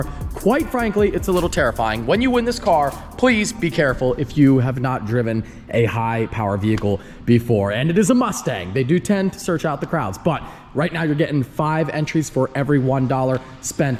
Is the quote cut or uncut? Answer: uncut